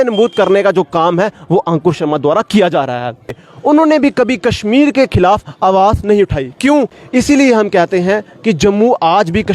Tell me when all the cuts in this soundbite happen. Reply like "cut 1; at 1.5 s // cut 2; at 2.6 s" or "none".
cut 1; at 3.4 s // cut 2; at 7.0 s